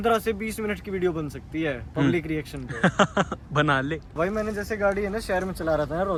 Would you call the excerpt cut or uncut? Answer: uncut